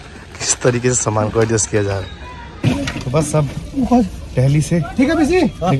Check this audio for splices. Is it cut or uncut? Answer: cut